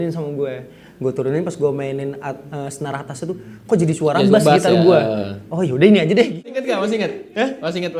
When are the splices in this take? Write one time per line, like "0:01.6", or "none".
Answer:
0:06.4